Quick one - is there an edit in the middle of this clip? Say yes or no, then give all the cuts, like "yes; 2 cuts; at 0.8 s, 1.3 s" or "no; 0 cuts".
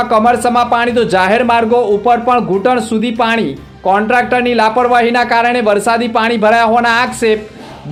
no; 0 cuts